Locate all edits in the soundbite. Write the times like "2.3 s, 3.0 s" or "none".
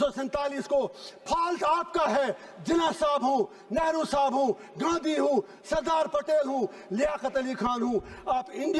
none